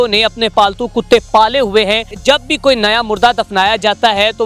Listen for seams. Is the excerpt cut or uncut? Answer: cut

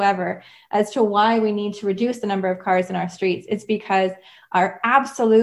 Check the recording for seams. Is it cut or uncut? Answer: uncut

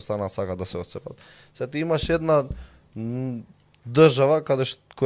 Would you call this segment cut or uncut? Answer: uncut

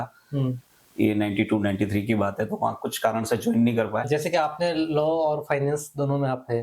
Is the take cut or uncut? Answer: cut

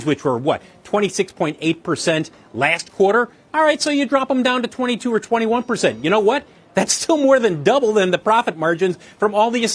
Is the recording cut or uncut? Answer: uncut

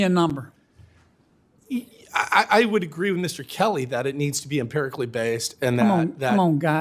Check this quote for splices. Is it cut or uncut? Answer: uncut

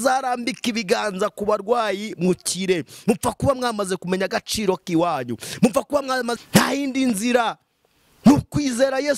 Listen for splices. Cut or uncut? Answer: cut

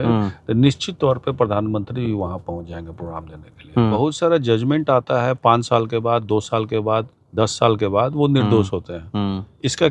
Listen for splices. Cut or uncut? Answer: cut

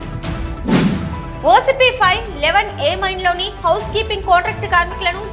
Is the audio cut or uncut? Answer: cut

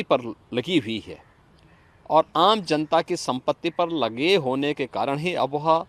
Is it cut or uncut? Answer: uncut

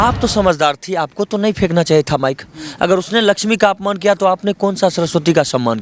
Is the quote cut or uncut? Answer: uncut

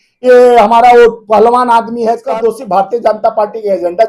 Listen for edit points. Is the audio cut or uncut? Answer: cut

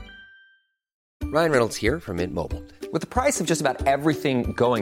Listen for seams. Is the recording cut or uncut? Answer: uncut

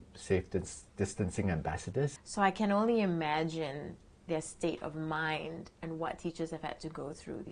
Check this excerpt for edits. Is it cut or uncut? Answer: cut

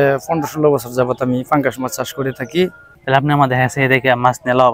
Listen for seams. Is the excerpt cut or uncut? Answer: cut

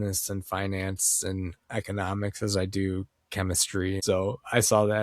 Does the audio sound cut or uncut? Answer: cut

